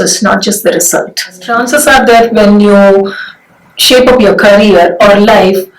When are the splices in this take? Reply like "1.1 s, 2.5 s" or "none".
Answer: 1.5 s

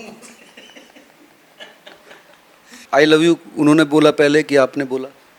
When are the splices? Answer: 2.8 s

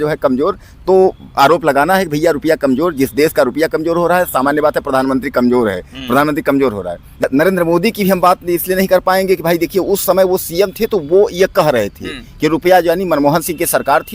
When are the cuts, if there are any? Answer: 7.3 s

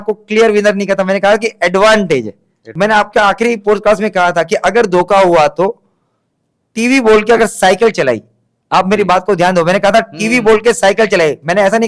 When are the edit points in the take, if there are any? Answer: 2.7 s

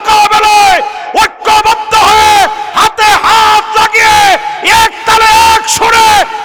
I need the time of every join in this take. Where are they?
none

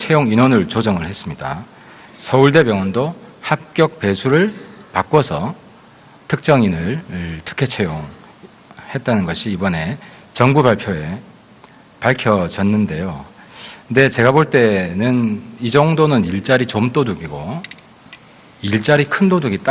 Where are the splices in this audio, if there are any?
9.2 s

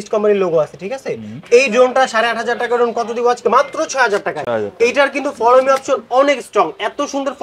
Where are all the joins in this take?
none

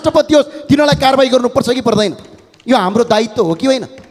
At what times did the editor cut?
none

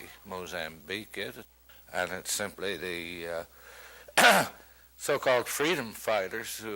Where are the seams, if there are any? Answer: 1.5 s

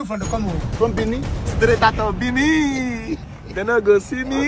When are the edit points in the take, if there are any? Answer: none

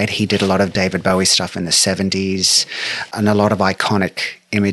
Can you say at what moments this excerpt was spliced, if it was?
3.1 s

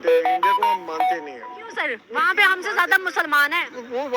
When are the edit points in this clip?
1.2 s

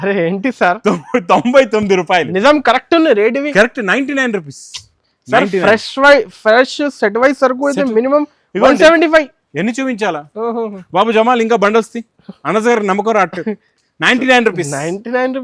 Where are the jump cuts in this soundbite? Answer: none

